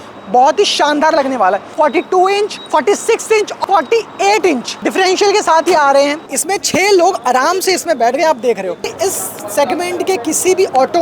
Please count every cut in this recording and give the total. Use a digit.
6